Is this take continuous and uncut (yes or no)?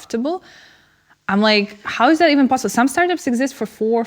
yes